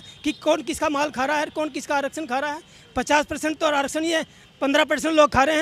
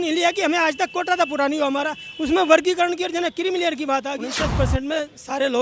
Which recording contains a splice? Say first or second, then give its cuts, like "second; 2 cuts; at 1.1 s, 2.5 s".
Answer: second; 1 cut; at 4.3 s